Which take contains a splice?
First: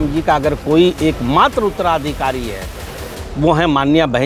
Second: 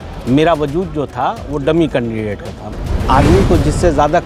second; 1 cut; at 2.6 s

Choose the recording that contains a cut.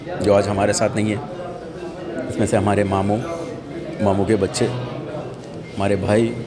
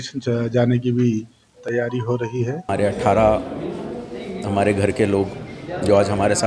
second; 1 cut; at 2.7 s

